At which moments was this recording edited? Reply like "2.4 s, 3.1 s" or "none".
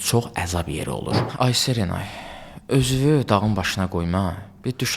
1.2 s